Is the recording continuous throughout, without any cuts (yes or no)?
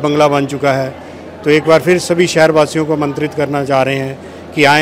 yes